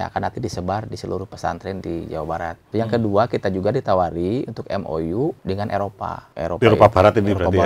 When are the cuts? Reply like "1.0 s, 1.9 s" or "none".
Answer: 2.6 s, 5.4 s, 6.2 s